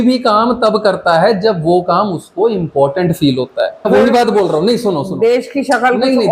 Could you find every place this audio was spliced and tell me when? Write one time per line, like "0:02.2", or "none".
0:03.9

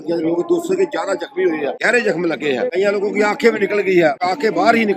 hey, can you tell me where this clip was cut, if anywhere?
0:01.8
0:02.7
0:04.2

